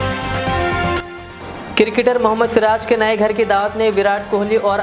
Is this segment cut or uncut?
uncut